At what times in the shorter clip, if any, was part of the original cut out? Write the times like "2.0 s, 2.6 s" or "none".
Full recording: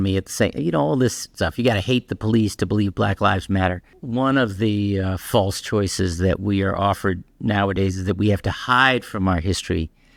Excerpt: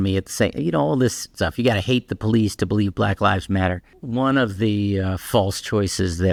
none